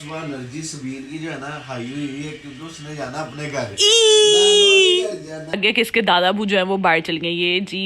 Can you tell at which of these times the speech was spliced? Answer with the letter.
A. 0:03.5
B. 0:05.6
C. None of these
B